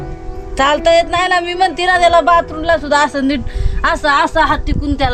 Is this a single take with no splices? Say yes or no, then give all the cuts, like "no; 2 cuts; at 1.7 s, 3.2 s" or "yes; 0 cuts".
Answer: yes; 0 cuts